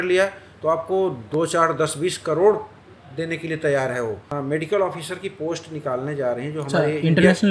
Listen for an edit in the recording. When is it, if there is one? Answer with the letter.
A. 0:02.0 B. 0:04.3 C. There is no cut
B